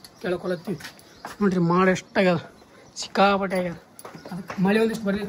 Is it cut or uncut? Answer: uncut